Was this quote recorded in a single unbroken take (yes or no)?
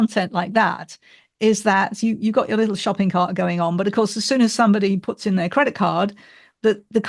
yes